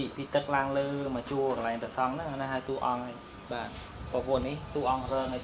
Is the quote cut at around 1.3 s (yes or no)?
no